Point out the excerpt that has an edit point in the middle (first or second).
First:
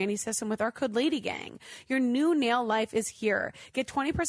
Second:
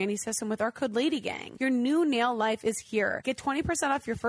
second